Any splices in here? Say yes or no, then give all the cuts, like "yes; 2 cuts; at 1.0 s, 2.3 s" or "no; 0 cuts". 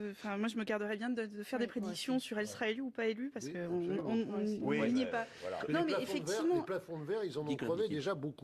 no; 0 cuts